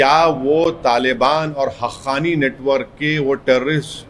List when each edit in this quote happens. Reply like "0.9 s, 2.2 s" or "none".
none